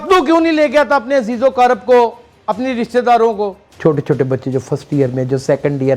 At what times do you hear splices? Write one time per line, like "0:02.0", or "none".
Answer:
0:03.6